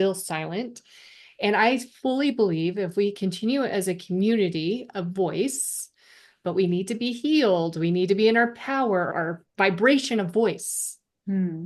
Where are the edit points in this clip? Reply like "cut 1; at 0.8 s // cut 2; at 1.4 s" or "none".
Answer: cut 1; at 3.2 s // cut 2; at 9.1 s